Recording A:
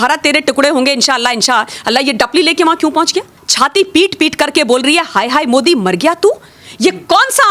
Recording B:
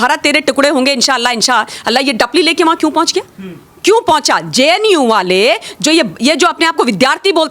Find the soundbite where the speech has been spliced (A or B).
A